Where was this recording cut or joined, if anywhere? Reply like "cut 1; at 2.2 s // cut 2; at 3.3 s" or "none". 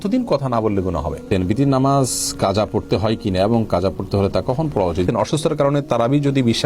cut 1; at 1.2 s // cut 2; at 5.1 s